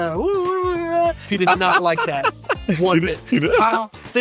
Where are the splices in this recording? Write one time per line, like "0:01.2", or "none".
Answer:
0:01.2